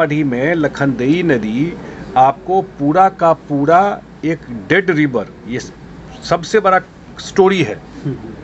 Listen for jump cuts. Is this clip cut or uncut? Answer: uncut